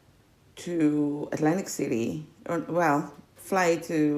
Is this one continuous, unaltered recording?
yes; 0 cuts

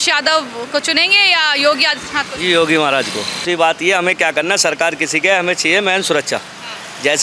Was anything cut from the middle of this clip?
yes; 1 cut; at 3.4 s

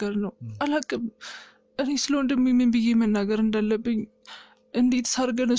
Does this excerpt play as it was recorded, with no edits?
yes; 0 cuts

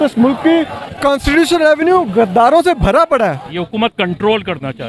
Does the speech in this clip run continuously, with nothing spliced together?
no; 1 cut; at 3.5 s

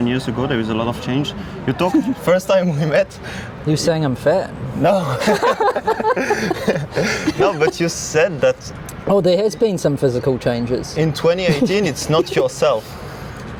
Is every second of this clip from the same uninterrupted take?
yes; 0 cuts

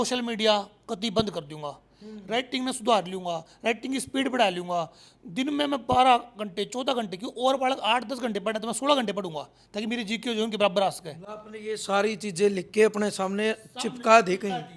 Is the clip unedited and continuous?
yes; 0 cuts

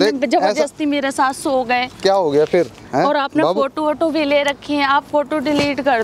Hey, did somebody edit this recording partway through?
no; 0 cuts

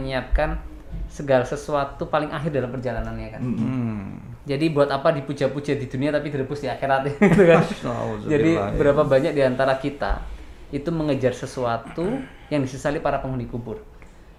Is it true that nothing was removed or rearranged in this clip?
yes; 0 cuts

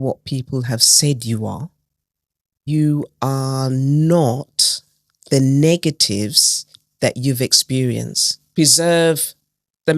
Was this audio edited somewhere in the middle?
yes; 2 cuts; at 2.6 s, 8.5 s

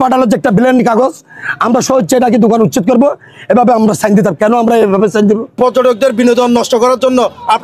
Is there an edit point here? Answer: yes; 1 cut; at 5.6 s

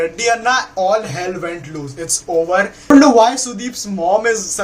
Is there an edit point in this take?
yes; 1 cut; at 2.9 s

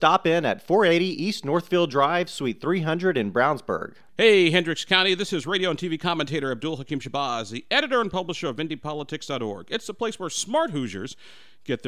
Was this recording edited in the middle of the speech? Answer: yes; 1 cut; at 4.0 s

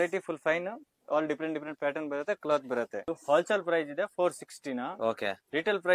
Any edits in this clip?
no; 0 cuts

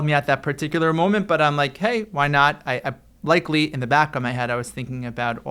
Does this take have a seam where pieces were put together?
no; 0 cuts

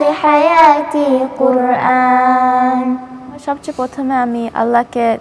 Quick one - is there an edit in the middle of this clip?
yes; 1 cut; at 3.4 s

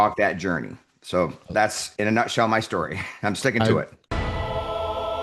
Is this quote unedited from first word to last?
no; 1 cut; at 4.0 s

